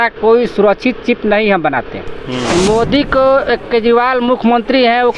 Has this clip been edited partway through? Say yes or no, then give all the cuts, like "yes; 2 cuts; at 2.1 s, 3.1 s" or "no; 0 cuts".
yes; 1 cut; at 2.4 s